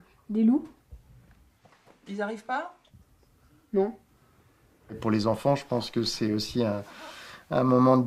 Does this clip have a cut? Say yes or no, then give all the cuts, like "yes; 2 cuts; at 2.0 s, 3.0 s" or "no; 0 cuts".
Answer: no; 0 cuts